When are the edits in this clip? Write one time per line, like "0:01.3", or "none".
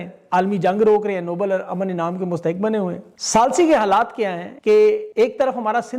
0:03.1
0:04.5
0:05.1